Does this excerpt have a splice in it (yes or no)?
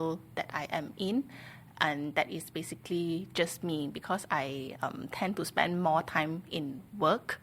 no